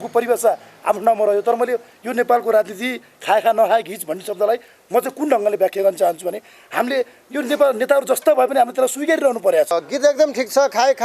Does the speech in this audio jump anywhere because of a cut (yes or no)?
yes